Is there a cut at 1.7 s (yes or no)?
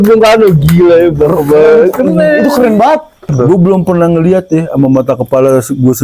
no